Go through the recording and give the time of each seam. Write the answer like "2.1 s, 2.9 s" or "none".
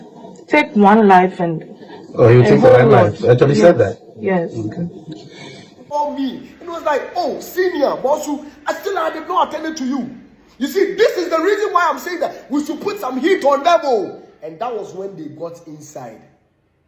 5.9 s